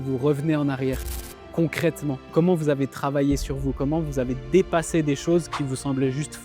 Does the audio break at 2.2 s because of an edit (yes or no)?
yes